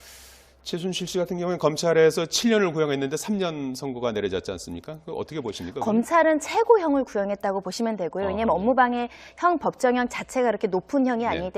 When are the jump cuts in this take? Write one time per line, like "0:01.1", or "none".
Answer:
0:10.2